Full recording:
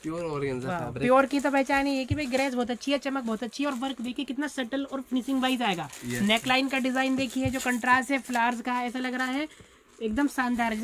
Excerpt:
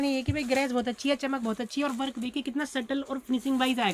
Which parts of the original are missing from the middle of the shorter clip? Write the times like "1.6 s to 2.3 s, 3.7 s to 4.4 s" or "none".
none